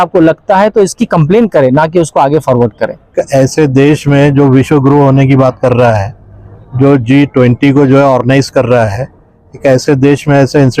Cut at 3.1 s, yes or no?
yes